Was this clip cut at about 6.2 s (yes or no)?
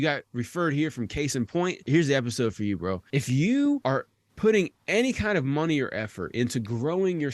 no